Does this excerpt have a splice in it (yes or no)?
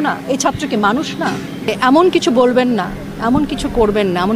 yes